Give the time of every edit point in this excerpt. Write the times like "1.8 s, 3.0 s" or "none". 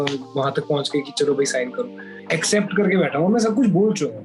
2.1 s